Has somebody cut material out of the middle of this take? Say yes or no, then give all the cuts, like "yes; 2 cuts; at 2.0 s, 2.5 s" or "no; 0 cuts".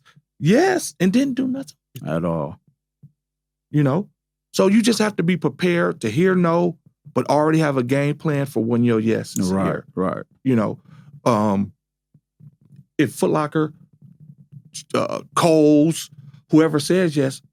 no; 0 cuts